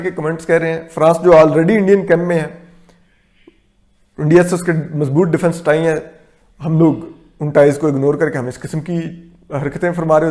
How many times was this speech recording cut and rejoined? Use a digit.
0